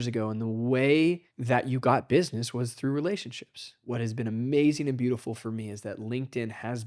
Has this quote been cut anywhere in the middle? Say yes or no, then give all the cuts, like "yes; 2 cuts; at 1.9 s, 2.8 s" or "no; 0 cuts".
yes; 2 cuts; at 1.3 s, 3.8 s